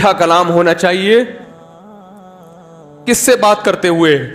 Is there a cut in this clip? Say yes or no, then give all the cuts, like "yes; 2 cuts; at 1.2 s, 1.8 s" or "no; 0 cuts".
no; 0 cuts